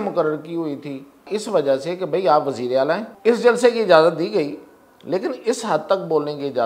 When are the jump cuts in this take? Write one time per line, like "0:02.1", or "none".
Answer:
0:01.3
0:03.1